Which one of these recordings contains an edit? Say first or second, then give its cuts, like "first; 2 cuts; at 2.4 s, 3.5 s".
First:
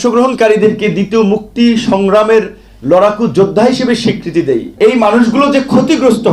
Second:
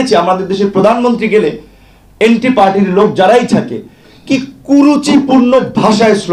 first; 1 cut; at 4.7 s